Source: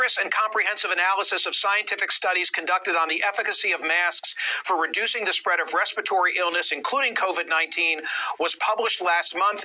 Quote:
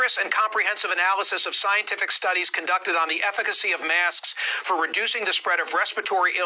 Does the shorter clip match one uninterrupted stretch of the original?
yes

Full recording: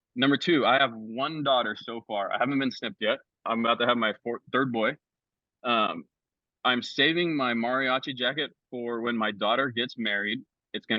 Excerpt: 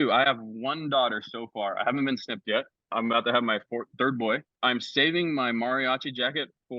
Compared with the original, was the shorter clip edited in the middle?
yes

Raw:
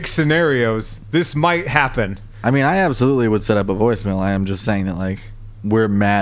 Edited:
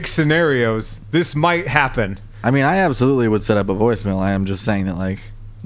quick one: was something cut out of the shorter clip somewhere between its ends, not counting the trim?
no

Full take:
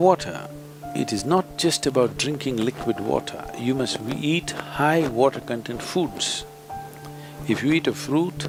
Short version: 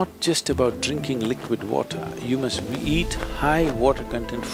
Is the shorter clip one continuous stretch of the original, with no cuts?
yes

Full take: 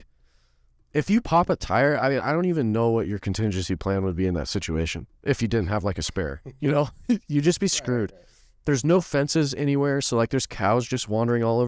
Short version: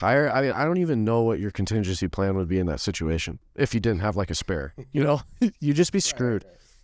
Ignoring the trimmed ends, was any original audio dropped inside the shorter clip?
no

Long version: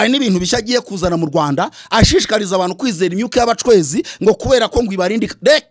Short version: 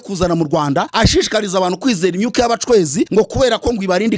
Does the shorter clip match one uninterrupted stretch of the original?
no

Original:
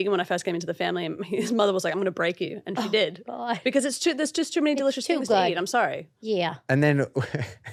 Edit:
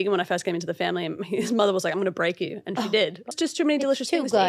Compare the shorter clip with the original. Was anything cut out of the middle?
yes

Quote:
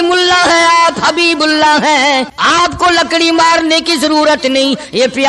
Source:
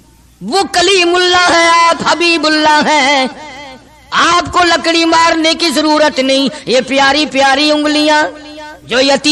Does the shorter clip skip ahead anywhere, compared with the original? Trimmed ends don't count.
yes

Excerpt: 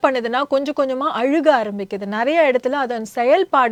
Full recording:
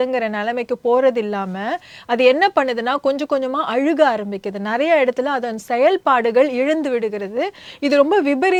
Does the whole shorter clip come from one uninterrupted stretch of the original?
yes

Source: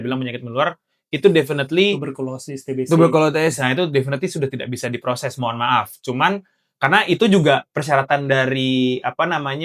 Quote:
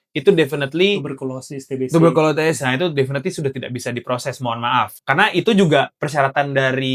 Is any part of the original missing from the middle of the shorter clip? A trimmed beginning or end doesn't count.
yes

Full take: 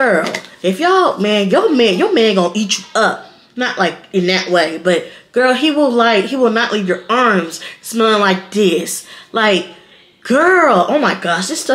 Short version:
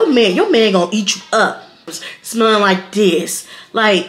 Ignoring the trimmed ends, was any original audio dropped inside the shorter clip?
yes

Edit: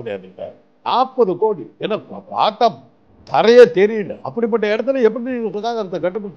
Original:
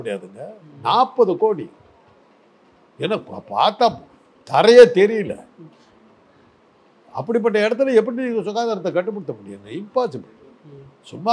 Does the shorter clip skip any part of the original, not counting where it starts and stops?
yes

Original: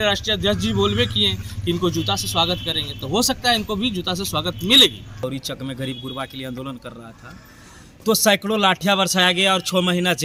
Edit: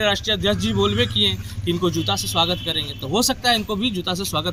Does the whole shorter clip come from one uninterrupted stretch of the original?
yes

